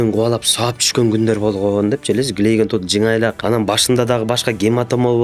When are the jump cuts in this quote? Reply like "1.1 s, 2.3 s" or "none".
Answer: 3.4 s